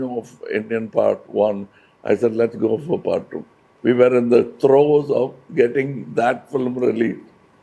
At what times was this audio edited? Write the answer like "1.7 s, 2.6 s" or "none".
none